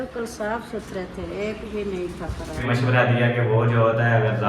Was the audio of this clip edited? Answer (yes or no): yes